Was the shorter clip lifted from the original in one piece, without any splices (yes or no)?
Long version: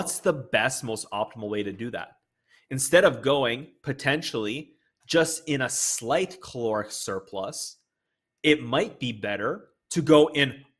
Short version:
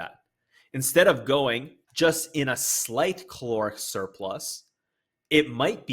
no